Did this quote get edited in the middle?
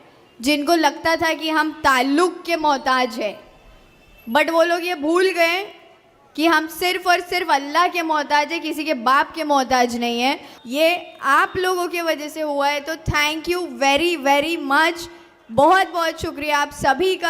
yes; 1 cut; at 10.5 s

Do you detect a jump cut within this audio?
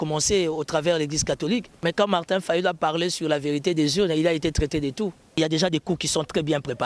yes; 2 cuts; at 1.7 s, 5.4 s

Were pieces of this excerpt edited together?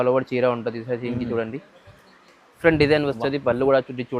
yes; 1 cut; at 2.6 s

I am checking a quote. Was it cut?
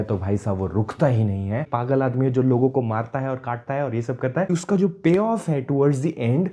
yes; 2 cuts; at 1.6 s, 4.5 s

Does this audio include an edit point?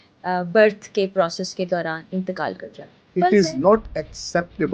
yes; 1 cut; at 3.1 s

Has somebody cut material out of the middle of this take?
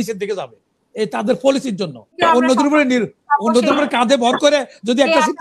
yes; 1 cut; at 2.0 s

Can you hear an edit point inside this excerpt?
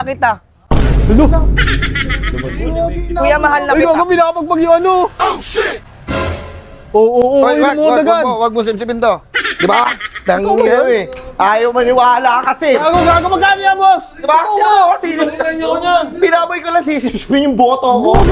no; 0 cuts

